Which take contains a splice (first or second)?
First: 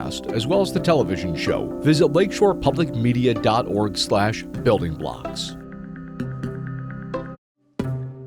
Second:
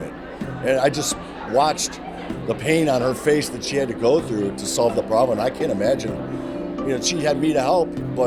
first